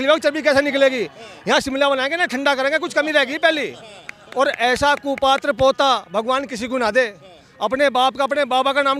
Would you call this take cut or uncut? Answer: uncut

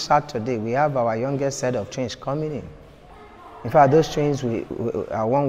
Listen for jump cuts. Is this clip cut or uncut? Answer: uncut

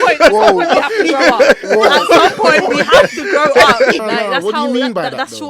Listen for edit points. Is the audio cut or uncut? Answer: cut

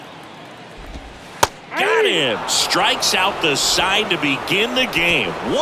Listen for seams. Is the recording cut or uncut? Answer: uncut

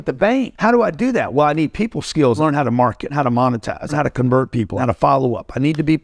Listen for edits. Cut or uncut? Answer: uncut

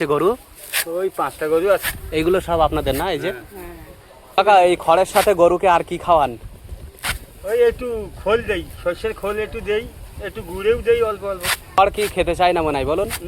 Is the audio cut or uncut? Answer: uncut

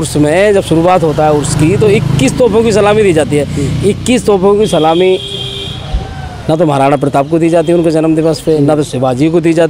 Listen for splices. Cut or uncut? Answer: uncut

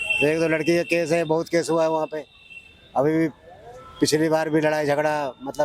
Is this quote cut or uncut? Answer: uncut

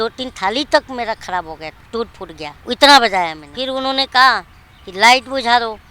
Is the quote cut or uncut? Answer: cut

